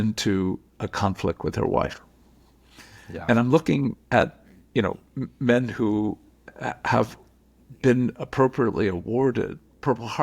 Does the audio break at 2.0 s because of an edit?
no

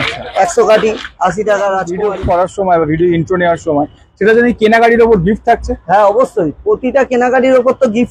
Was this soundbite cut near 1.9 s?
yes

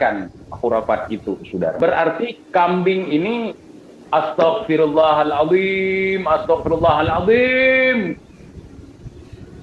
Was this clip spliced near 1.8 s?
yes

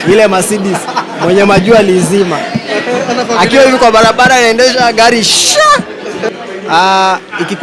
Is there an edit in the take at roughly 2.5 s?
no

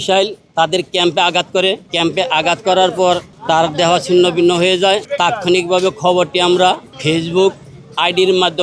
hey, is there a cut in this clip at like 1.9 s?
yes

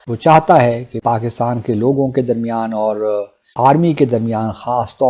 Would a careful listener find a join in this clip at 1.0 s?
yes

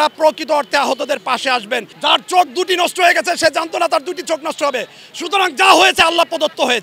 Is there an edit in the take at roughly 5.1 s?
no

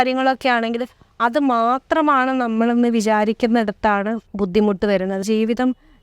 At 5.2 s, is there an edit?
yes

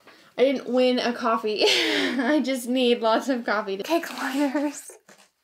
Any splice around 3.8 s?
yes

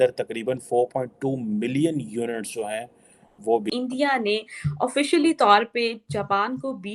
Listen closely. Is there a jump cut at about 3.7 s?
yes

